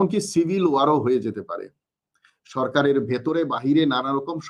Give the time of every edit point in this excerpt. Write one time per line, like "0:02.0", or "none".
none